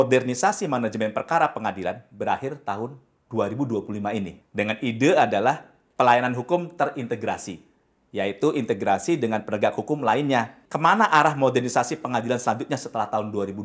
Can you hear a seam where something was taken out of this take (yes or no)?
yes